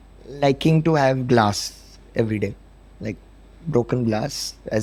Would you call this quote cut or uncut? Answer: uncut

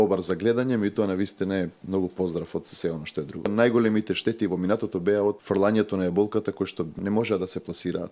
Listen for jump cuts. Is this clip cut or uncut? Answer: cut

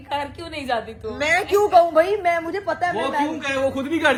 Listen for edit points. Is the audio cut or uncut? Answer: uncut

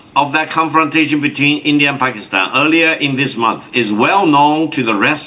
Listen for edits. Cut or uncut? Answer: uncut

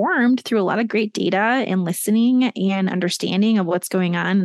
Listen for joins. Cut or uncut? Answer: uncut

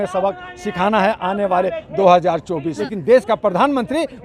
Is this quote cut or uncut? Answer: cut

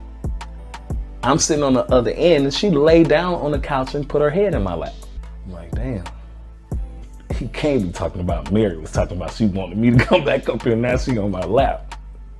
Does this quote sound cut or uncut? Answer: cut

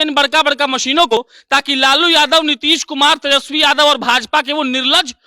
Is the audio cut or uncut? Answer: cut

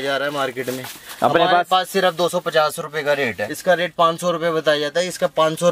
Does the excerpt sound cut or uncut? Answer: cut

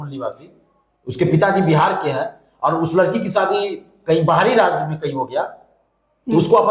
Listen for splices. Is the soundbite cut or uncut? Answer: uncut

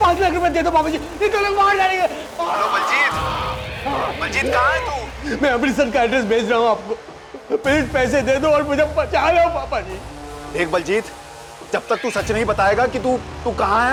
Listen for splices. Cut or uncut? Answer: uncut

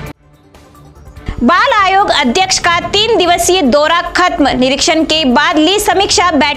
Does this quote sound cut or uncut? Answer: uncut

